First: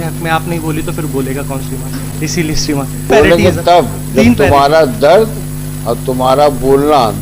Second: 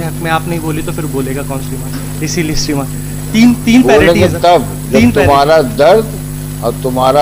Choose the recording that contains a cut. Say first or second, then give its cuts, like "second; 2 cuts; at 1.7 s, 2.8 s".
first; 1 cut; at 3.1 s